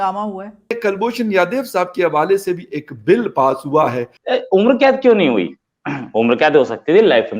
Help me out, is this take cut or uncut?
cut